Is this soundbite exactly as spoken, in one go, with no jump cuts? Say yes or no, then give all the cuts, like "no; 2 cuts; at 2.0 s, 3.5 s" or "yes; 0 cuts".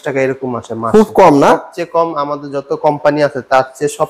yes; 0 cuts